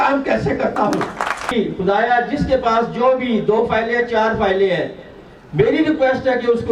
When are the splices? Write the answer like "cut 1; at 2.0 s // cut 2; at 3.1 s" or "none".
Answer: cut 1; at 1.5 s